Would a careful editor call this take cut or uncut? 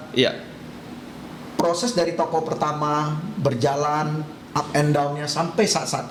uncut